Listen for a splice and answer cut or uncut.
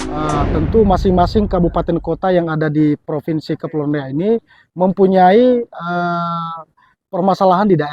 uncut